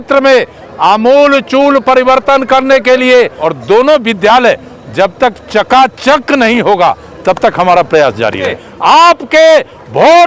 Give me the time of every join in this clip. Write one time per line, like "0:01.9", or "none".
0:03.4
0:08.6